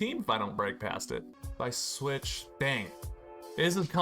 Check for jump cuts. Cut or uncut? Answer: cut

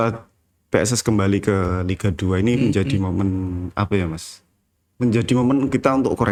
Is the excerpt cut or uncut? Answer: uncut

